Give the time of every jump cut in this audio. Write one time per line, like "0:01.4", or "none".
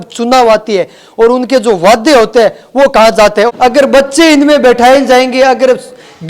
0:03.5